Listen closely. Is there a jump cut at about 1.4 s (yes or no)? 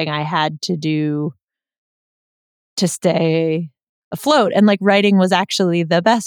no